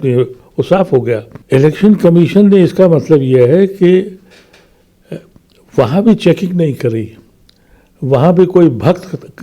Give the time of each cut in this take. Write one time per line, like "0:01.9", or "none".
0:01.3